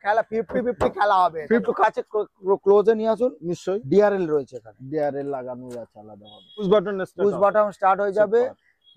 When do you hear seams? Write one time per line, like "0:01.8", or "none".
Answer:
0:01.7
0:06.7